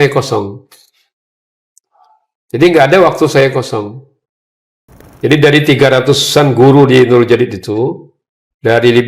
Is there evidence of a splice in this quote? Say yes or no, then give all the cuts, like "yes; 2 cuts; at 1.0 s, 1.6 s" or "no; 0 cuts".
yes; 1 cut; at 5.0 s